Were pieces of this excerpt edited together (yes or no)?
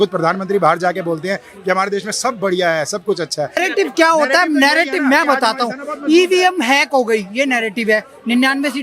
yes